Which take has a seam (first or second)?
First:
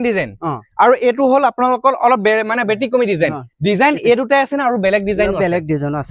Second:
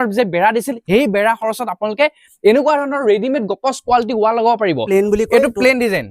second